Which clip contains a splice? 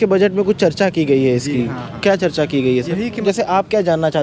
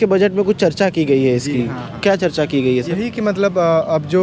first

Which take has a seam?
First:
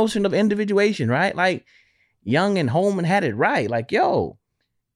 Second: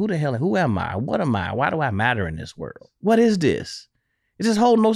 second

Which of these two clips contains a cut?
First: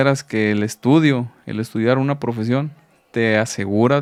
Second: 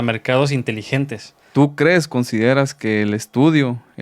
second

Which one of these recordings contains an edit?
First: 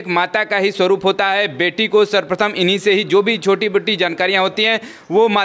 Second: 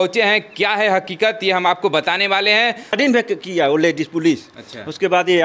second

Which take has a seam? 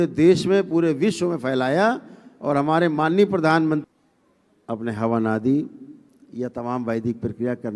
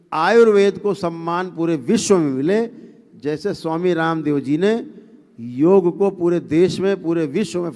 first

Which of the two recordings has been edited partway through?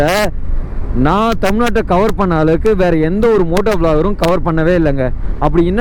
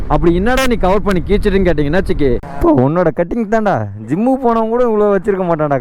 second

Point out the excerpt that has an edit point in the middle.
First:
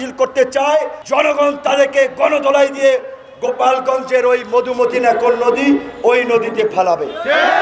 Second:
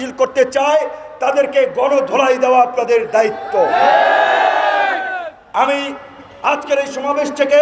first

